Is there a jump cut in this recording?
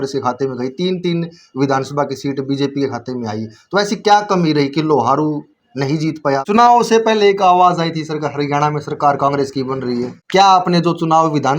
yes; 2 cuts; at 6.4 s, 10.1 s

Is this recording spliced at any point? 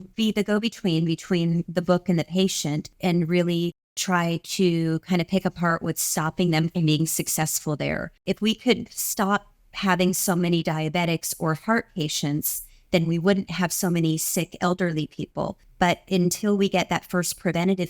yes; 3 cuts; at 2.9 s, 8.1 s, 15.6 s

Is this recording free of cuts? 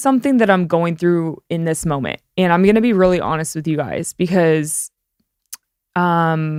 yes; 0 cuts

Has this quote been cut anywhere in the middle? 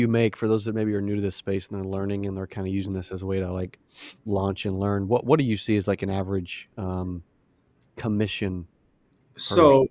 no; 0 cuts

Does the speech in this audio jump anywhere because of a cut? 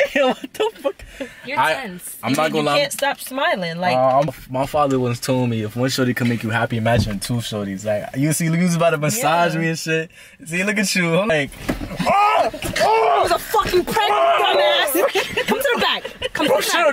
yes; 2 cuts; at 4.3 s, 11.3 s

